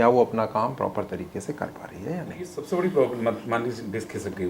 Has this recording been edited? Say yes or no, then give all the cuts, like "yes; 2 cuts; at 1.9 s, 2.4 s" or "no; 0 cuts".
yes; 1 cut; at 2.6 s